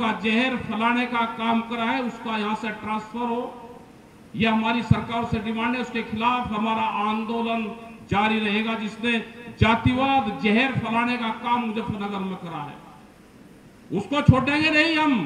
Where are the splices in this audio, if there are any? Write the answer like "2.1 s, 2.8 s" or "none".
none